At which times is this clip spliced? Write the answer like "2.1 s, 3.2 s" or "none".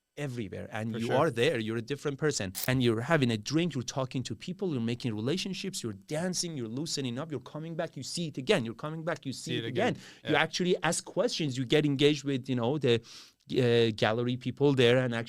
2.7 s